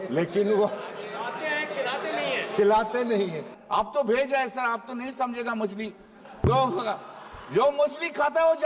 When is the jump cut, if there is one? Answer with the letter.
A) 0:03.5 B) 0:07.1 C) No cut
A